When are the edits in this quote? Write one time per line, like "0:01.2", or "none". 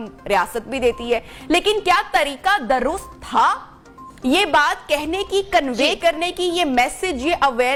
none

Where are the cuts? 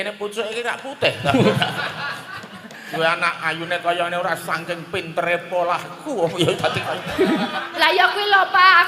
0:02.9
0:07.6

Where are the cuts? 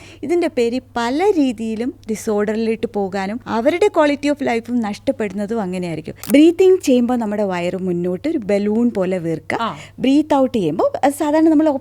0:03.4
0:06.1

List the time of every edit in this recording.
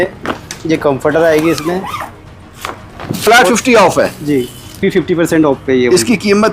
0:03.2
0:04.8

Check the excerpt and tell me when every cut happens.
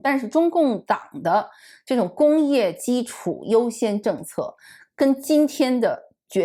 none

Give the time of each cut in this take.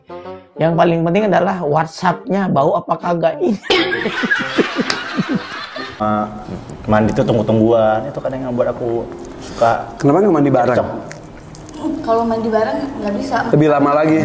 0:06.0

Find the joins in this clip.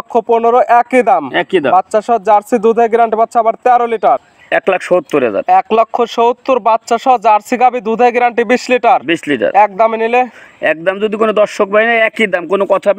0:04.2

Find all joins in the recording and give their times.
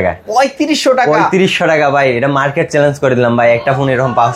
none

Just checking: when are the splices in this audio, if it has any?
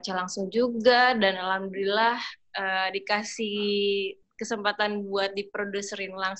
none

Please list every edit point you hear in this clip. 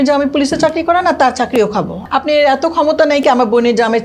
0:02.0

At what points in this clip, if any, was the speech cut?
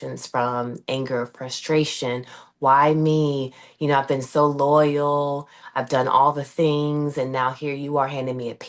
none

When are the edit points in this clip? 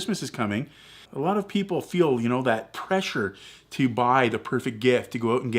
0:01.1

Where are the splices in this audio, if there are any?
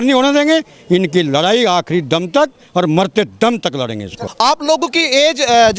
0:04.2

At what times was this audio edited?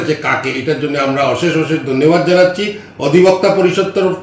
none

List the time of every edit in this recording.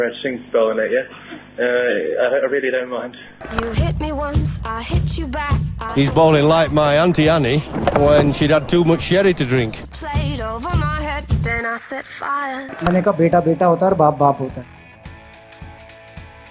none

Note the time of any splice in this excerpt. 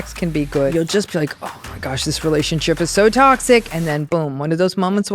0:00.7
0:03.9

